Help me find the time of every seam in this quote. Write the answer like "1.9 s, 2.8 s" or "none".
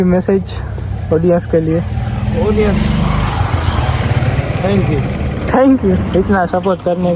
none